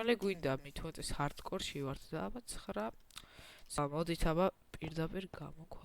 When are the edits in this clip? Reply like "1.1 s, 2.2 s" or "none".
3.8 s